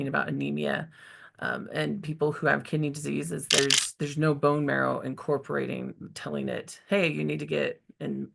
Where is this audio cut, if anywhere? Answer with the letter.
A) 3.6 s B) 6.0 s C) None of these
A